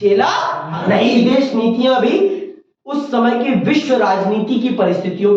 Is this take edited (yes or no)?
yes